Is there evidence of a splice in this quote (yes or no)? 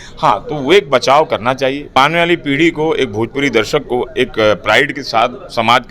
yes